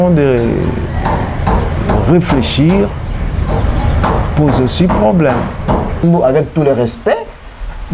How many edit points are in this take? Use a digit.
1